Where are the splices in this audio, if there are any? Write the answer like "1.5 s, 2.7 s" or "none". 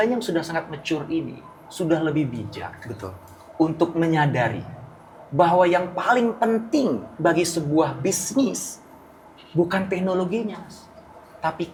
none